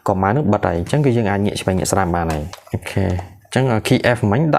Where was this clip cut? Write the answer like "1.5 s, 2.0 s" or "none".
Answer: 2.5 s